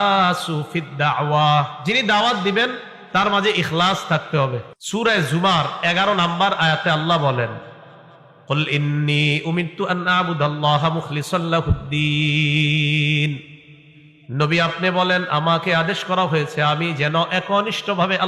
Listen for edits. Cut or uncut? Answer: cut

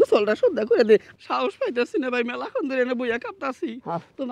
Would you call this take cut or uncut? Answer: uncut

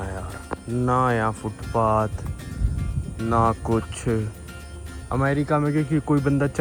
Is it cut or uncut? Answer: uncut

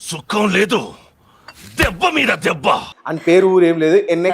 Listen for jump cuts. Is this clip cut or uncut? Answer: cut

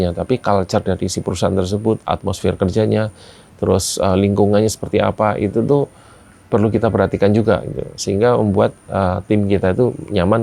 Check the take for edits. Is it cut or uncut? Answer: uncut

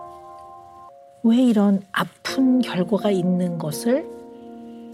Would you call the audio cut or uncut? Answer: cut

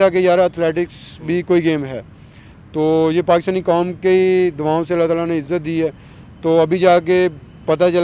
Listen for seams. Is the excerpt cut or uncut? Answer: uncut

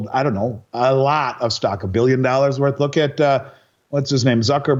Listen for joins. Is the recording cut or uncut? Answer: uncut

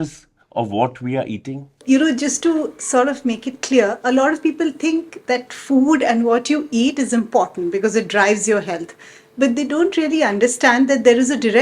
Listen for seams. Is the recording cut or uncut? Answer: cut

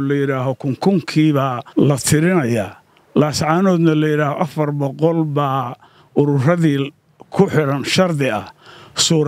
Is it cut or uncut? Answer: cut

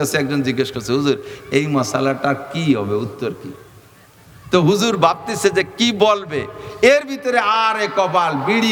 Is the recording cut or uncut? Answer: uncut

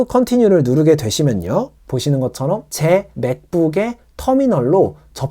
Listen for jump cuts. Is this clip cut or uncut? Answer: cut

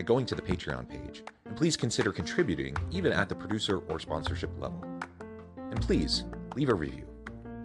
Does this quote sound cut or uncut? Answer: uncut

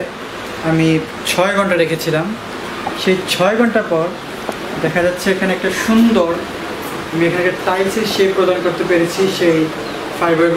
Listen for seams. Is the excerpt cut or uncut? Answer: uncut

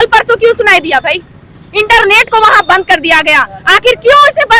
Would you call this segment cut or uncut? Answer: uncut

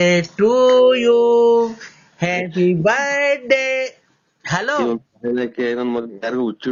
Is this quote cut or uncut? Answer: uncut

